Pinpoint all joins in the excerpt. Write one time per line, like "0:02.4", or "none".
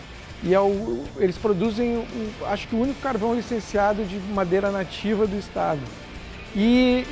none